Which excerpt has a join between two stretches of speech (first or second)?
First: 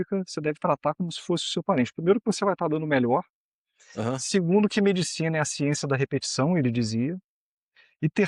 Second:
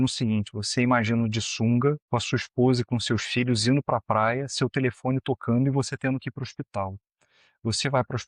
second